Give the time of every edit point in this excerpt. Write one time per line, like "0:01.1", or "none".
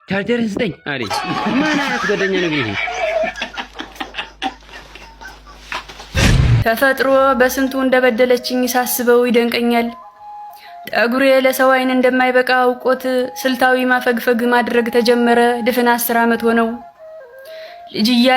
0:06.4